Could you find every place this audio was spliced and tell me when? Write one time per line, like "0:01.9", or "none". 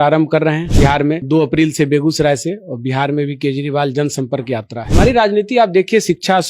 0:01.1
0:04.8